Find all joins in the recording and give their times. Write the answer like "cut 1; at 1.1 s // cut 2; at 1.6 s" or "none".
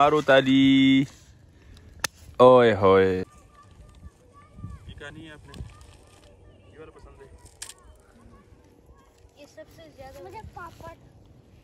cut 1; at 3.2 s